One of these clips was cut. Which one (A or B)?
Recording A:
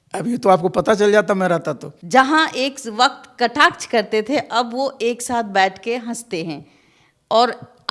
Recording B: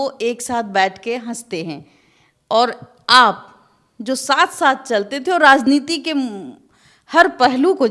A